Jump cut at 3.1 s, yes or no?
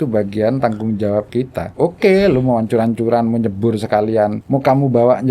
no